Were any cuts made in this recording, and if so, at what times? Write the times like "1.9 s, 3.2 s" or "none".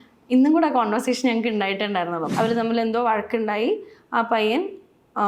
2.3 s